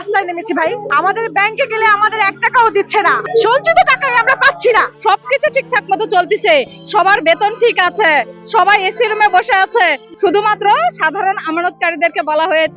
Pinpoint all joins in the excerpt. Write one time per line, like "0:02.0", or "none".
0:00.9
0:03.2
0:04.9
0:10.1